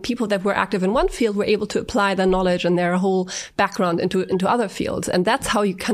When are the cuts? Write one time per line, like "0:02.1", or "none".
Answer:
none